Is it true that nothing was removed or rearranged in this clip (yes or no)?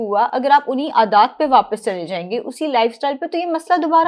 yes